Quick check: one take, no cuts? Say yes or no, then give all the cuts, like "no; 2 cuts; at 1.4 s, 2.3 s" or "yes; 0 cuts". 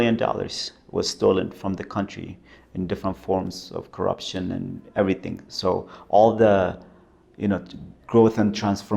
yes; 0 cuts